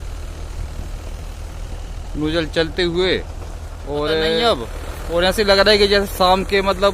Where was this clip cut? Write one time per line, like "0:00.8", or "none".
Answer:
0:04.4